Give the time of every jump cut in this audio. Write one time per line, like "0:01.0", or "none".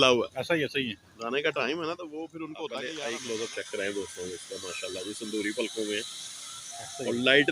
0:02.9